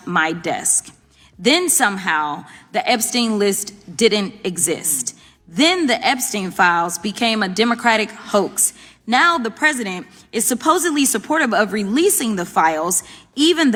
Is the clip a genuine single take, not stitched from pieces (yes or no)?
yes